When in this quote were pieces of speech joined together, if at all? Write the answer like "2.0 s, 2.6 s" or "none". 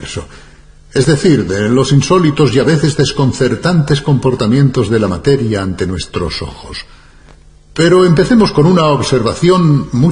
1.5 s